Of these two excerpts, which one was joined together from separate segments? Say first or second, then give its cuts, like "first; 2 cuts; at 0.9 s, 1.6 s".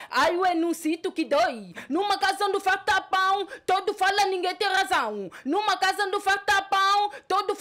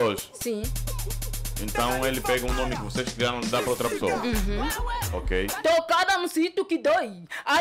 second; 1 cut; at 5.5 s